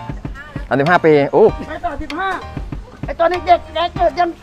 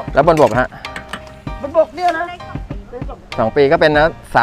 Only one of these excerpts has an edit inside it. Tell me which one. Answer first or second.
first